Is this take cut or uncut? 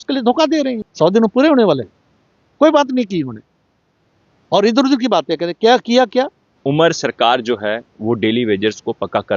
cut